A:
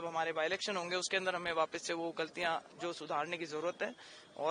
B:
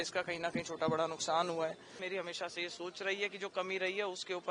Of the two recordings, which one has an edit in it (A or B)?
B